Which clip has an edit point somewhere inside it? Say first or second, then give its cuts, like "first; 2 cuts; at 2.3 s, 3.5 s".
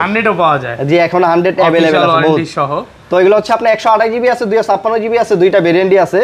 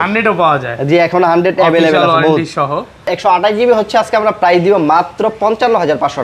second; 1 cut; at 3.1 s